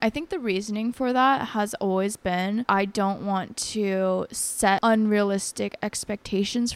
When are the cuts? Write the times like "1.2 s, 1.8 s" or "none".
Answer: 2.6 s, 4.8 s